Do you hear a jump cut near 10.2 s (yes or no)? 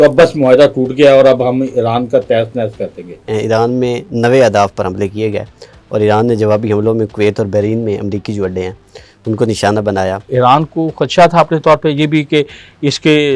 yes